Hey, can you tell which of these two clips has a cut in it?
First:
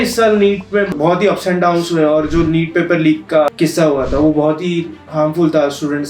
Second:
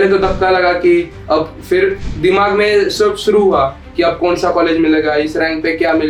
first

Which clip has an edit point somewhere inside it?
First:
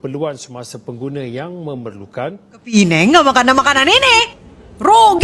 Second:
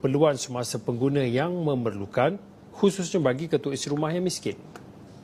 first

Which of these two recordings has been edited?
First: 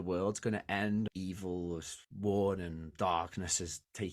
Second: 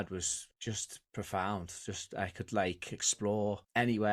first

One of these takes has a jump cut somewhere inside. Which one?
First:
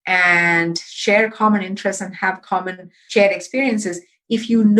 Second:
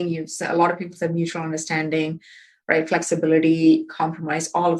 first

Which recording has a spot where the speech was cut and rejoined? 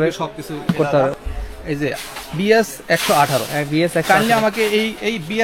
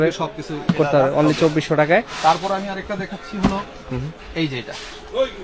first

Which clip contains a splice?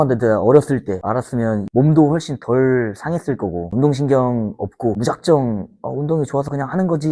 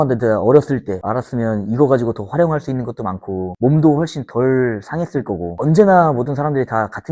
first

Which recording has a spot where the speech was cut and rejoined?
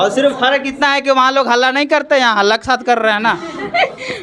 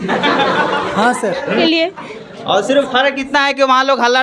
second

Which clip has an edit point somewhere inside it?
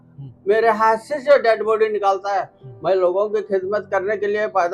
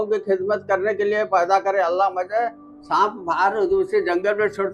second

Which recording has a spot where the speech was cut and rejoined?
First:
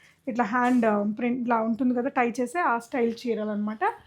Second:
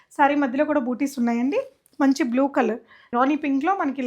second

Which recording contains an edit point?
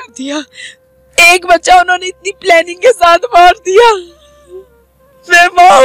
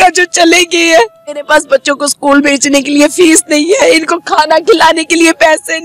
second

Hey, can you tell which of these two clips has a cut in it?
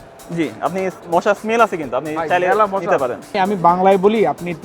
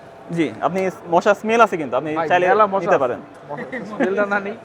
first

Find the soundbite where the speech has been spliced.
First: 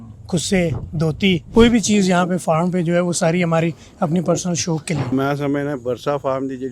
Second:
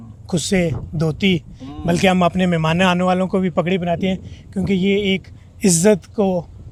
first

